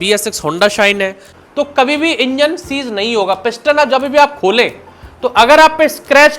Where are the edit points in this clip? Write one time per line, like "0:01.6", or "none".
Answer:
0:01.3